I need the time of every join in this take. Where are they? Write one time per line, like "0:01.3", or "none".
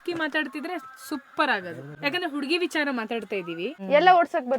0:01.9
0:03.8